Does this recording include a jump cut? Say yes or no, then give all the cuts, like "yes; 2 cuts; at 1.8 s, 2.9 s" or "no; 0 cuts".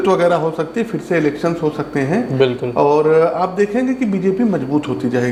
no; 0 cuts